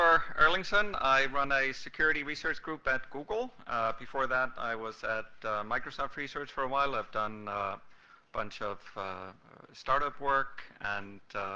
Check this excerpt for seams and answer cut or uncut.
uncut